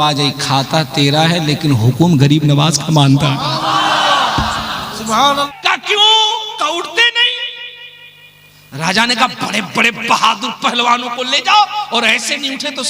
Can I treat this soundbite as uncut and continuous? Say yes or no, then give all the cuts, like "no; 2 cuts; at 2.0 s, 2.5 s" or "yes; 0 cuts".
no; 1 cut; at 5.5 s